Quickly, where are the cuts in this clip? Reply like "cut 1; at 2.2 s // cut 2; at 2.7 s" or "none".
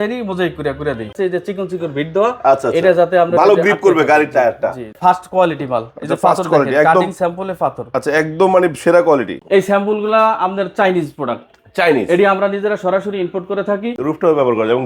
cut 1; at 1.1 s // cut 2; at 4.9 s // cut 3; at 9.4 s // cut 4; at 13.9 s